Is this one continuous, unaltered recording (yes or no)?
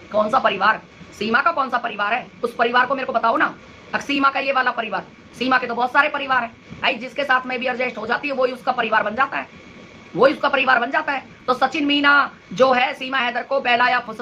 yes